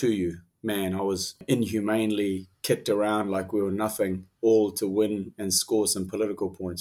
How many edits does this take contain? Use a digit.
1